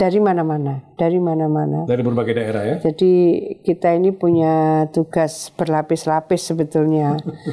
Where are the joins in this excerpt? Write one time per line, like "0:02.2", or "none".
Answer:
none